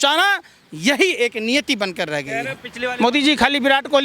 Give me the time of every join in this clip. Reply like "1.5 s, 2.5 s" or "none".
2.6 s